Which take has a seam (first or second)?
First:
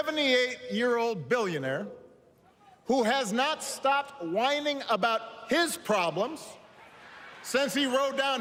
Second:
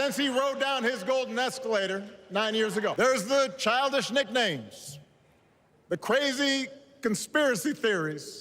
second